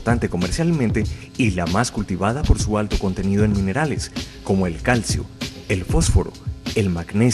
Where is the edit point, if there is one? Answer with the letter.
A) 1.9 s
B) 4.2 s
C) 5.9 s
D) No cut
D